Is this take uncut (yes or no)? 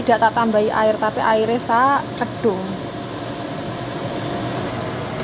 yes